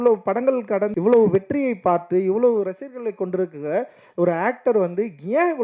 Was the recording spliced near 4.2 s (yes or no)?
no